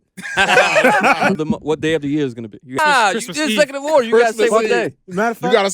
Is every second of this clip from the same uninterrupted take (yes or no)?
no